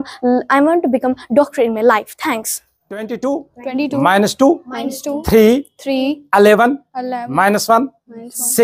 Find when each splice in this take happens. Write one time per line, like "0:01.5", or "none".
none